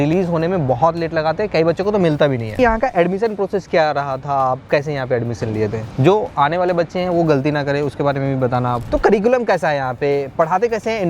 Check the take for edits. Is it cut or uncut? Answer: cut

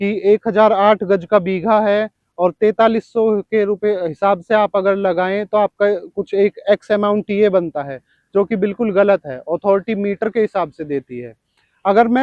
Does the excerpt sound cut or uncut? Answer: uncut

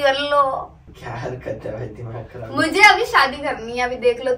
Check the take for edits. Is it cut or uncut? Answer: uncut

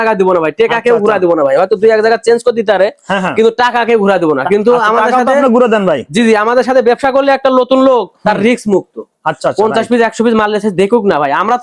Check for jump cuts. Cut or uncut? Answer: uncut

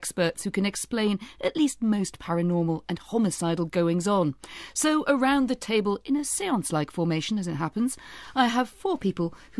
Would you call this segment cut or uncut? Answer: uncut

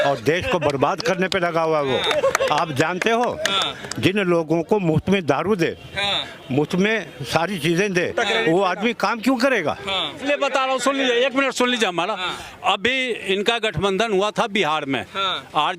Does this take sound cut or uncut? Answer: cut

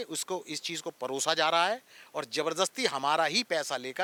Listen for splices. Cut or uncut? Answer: uncut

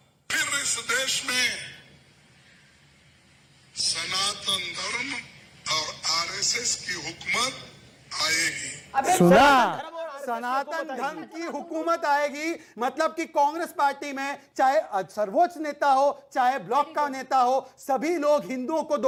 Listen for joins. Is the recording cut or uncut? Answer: uncut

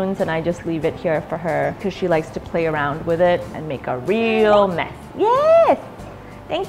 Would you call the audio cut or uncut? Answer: cut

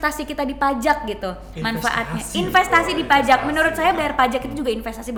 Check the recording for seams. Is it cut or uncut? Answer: uncut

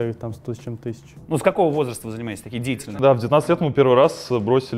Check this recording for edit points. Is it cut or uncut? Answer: cut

